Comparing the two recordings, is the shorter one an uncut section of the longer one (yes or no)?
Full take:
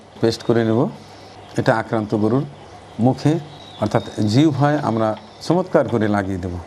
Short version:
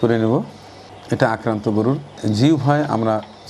no